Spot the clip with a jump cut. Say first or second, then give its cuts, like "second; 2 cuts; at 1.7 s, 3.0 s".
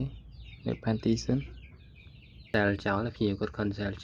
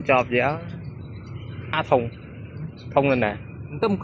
first; 1 cut; at 2.5 s